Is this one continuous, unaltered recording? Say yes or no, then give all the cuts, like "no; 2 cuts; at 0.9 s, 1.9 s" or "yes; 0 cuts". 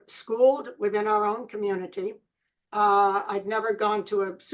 yes; 0 cuts